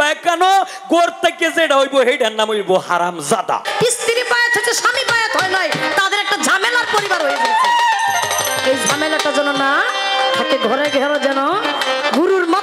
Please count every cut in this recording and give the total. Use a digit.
1